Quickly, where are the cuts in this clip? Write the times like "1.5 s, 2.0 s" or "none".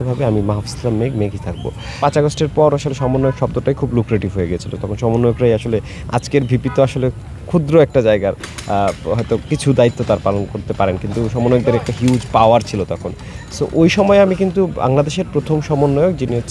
2.0 s